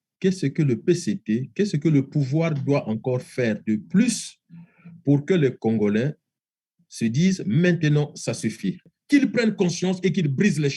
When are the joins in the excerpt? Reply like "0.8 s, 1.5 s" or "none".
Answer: 8.9 s